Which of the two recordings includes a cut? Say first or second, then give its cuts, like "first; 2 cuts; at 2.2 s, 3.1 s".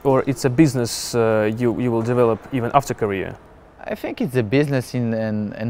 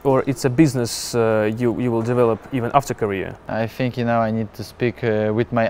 second; 1 cut; at 3.4 s